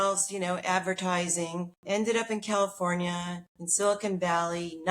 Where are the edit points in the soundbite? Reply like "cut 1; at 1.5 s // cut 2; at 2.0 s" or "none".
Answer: cut 1; at 1.8 s